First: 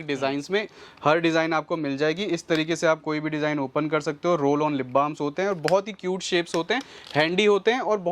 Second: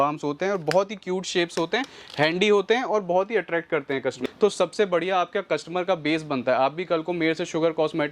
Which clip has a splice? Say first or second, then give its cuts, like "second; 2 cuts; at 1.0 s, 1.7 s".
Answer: second; 1 cut; at 4.2 s